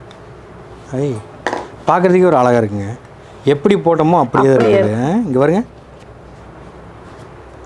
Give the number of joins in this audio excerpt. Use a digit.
0